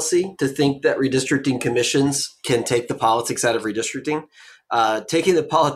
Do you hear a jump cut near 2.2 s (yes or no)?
no